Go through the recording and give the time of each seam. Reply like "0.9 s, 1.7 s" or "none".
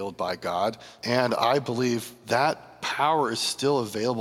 0.9 s, 2.1 s, 2.8 s

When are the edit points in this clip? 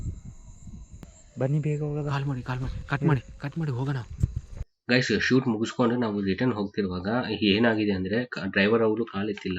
1.2 s

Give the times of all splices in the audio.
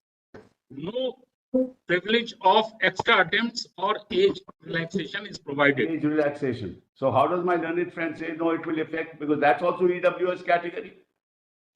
5.9 s

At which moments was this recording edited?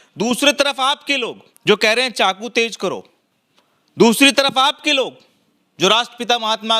1.4 s

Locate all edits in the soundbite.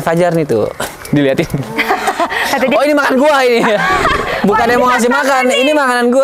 none

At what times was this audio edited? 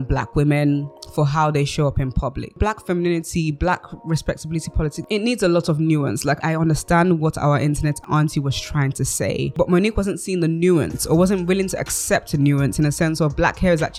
2.6 s, 5.0 s, 6.4 s, 8.0 s, 9.5 s

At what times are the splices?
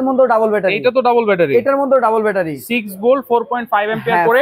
none

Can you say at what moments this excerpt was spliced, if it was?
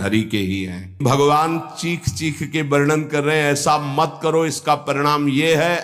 1.0 s

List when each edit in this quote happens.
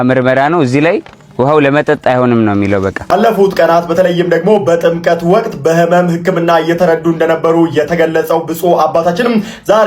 3.0 s

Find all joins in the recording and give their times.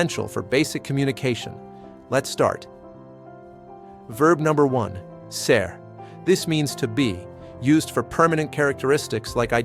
none

